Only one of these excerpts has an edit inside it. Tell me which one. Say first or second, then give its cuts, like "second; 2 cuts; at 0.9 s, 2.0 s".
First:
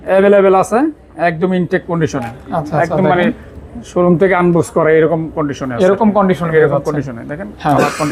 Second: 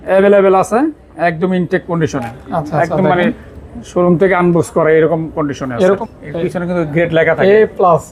second; 1 cut; at 6.0 s